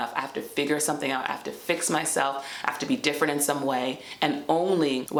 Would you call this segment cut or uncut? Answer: uncut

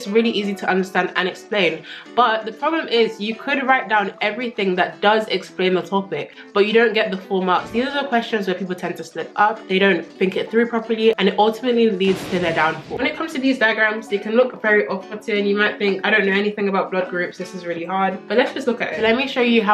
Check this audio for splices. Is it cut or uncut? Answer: cut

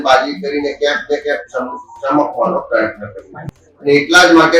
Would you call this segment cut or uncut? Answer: cut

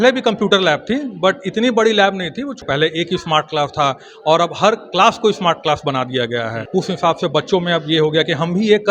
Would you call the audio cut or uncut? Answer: cut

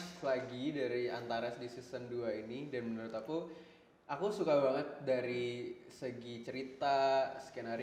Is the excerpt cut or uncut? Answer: uncut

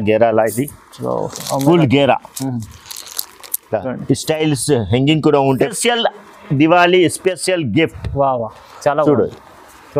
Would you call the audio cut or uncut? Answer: cut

